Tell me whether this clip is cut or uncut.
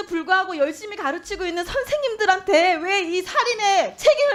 uncut